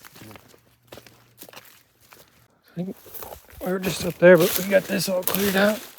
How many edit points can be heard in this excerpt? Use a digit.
1